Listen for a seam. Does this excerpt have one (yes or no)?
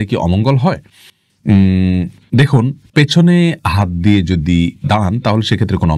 no